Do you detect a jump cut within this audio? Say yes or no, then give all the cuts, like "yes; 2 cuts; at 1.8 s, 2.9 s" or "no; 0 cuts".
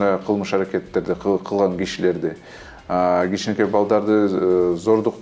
no; 0 cuts